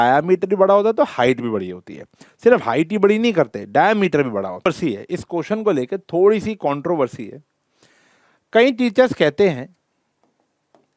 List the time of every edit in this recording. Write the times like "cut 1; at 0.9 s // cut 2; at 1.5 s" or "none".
cut 1; at 4.7 s